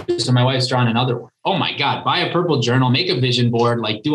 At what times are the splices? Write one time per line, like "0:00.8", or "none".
0:01.3